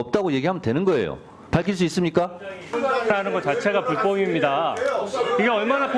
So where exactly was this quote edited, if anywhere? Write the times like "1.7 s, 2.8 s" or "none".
2.7 s